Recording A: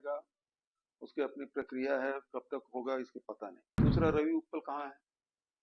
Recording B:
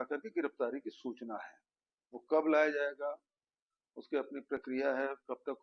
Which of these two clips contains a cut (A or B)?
A